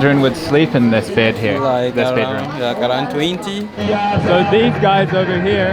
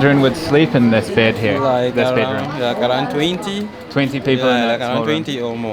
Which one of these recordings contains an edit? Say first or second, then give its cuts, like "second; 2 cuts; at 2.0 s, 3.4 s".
first; 1 cut; at 3.8 s